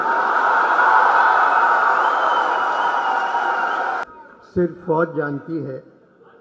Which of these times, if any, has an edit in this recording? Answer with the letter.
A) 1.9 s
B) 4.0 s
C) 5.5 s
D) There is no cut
B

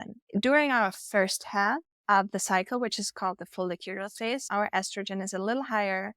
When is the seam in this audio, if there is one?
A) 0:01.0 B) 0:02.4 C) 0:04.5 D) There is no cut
C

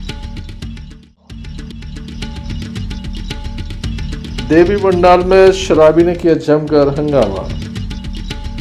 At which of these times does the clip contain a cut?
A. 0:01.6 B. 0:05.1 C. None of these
A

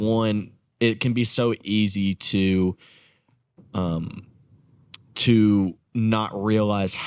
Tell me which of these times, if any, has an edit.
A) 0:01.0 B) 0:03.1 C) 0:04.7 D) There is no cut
D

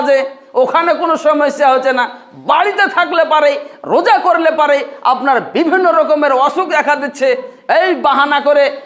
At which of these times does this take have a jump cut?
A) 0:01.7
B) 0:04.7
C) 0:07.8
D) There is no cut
D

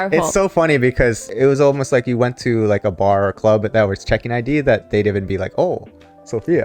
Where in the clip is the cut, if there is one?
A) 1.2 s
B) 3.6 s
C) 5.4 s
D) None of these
A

